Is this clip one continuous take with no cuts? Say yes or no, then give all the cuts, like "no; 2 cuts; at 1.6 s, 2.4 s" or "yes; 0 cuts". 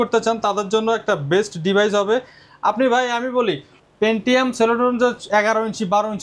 yes; 0 cuts